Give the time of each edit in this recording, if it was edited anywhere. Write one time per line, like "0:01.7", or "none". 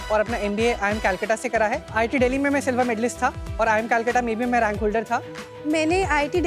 0:01.9
0:03.4
0:05.5